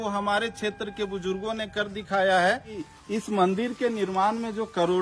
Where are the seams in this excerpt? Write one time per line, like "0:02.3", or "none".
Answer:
0:02.9